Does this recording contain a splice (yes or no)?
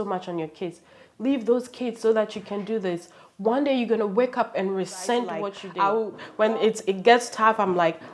yes